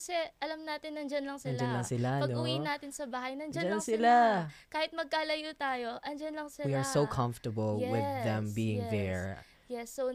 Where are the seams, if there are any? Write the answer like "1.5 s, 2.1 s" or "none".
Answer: none